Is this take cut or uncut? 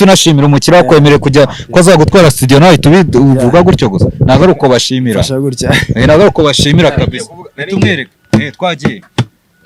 uncut